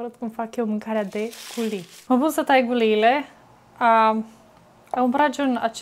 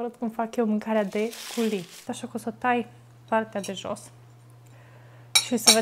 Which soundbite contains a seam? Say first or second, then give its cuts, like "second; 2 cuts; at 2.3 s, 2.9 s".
second; 1 cut; at 2.0 s